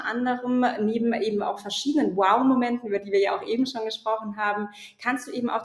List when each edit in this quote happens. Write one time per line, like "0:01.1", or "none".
none